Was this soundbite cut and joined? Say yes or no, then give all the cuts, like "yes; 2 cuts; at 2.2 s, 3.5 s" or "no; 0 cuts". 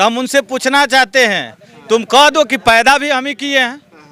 no; 0 cuts